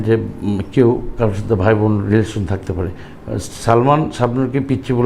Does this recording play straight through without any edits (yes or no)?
yes